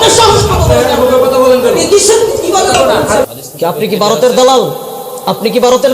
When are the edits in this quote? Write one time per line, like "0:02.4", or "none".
0:03.2